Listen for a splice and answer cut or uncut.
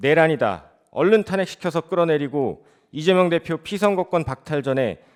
uncut